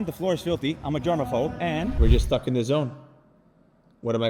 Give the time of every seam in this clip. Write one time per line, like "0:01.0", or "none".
0:02.0